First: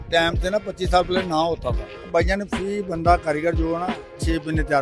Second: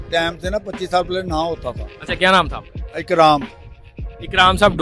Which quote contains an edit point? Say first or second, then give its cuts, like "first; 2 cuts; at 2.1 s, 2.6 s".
first; 1 cut; at 1.9 s